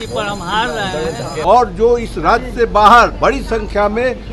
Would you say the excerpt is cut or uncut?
cut